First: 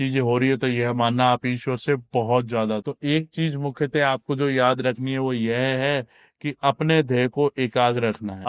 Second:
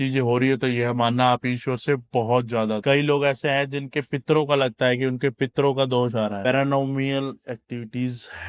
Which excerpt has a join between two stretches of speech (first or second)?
second